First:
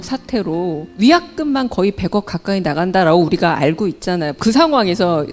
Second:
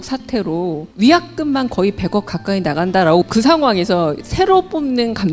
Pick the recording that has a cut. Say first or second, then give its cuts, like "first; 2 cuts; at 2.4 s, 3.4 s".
second; 1 cut; at 3.3 s